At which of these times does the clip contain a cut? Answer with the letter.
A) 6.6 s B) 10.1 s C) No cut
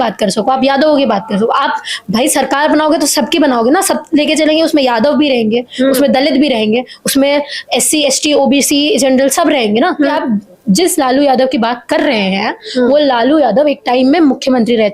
B